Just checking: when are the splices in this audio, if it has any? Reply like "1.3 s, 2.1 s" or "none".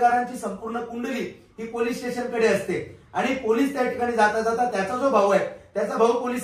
none